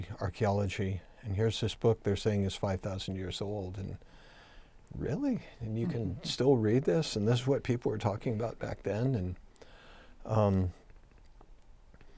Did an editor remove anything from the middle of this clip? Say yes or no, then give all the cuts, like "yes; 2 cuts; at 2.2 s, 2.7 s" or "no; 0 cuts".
no; 0 cuts